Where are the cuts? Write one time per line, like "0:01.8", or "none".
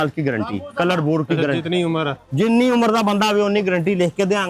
none